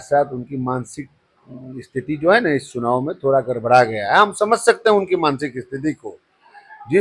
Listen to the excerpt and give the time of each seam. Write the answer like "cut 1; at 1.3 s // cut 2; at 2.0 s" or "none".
none